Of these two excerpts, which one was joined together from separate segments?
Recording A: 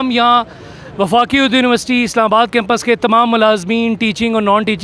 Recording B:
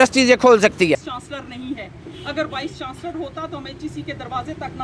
B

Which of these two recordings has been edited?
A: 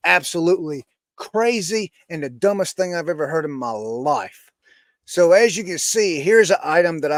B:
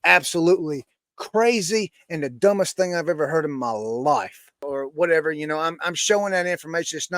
B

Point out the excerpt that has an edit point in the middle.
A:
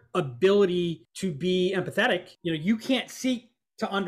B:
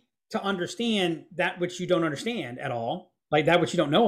A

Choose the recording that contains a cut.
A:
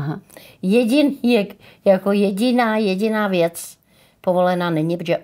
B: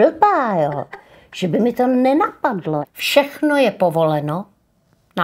B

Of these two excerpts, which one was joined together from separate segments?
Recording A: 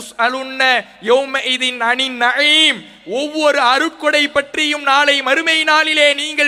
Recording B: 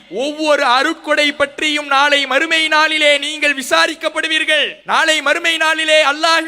B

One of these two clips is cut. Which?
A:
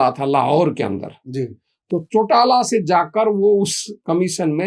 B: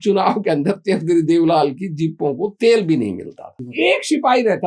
B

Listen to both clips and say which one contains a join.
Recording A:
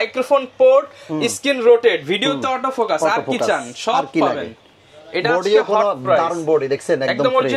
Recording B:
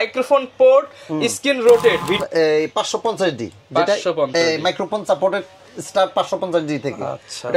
B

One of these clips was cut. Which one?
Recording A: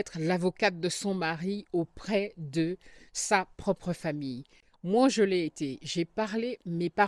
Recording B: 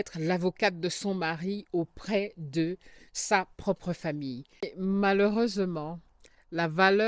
B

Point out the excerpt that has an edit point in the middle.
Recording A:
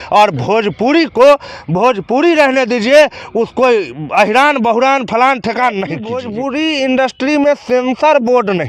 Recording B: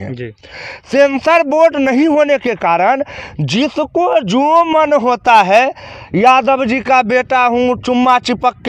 A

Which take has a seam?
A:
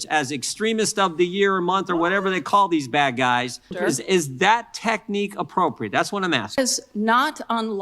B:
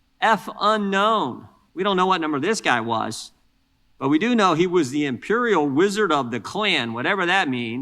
A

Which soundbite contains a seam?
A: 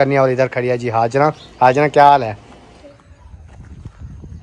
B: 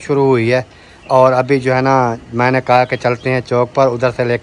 A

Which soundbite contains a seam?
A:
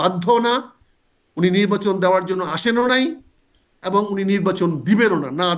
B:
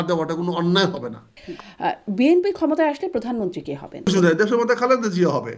B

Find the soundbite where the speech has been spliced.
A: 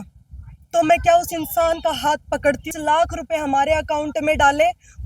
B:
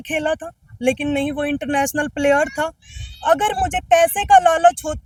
A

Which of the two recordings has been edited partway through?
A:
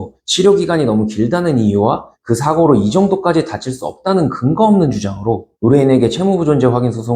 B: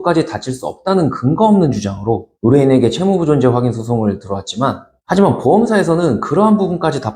B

